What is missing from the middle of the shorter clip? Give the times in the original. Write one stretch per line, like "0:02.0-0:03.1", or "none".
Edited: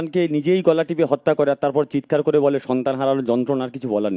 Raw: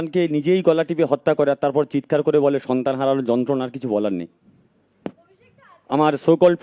none

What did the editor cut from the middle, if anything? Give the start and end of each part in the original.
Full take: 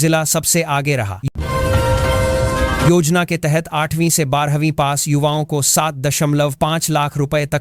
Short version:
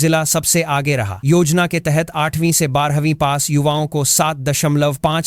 0:01.3-0:02.8

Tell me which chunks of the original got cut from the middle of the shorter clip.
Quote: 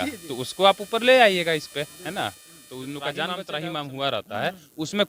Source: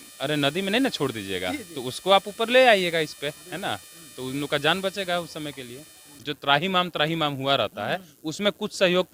0:05.0-0:06.9

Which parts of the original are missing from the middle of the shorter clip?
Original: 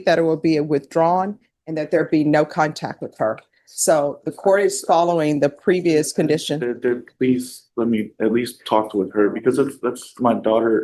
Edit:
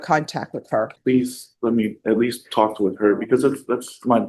0:03.4-0:07.1

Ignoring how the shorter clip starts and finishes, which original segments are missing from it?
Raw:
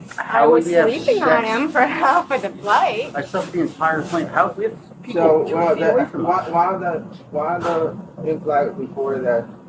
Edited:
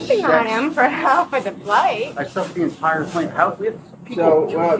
none

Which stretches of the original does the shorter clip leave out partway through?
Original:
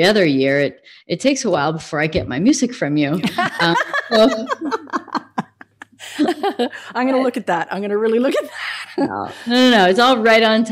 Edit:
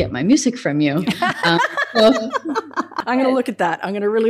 0:05.1-0:06.8

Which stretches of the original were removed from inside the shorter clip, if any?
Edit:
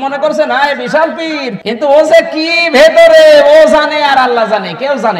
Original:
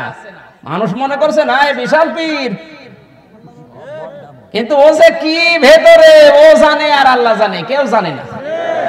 0:02.6-0:04.5

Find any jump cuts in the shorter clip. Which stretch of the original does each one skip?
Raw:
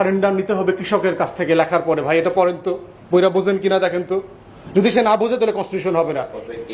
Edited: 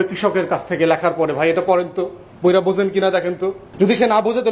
0:04.3-0:04.5

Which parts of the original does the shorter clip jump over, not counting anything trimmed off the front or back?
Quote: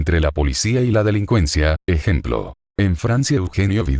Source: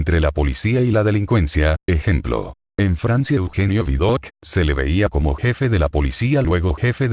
none

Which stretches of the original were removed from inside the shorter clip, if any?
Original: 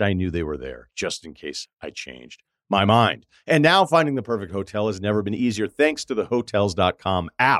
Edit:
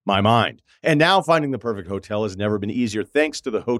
none

